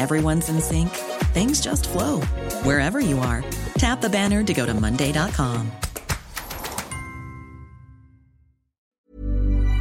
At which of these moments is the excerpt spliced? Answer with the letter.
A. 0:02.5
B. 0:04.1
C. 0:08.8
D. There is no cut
C